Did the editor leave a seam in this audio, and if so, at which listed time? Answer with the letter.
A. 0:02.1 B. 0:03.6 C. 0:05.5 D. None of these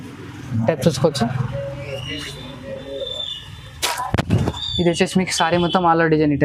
D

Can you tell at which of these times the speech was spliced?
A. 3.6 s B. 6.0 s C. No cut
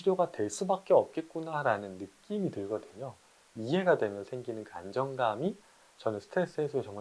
A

